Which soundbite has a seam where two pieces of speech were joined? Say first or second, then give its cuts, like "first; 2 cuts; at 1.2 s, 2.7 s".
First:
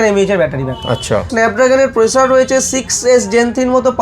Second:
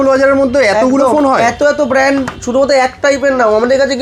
first; 1 cut; at 1.3 s